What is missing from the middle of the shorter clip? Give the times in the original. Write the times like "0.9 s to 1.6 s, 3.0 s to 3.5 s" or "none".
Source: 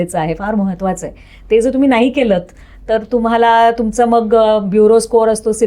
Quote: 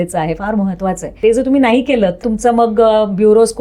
1.1 s to 1.4 s, 2.6 s to 3.8 s